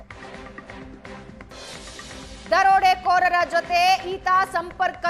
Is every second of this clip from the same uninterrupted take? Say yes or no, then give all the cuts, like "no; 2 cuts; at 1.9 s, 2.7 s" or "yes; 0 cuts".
no; 1 cut; at 1.2 s